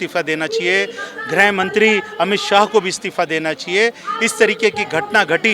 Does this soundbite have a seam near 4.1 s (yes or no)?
no